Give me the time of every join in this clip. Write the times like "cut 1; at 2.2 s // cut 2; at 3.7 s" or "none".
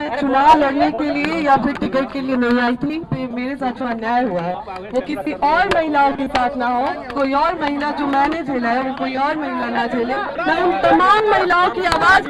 cut 1; at 3.1 s // cut 2; at 10.4 s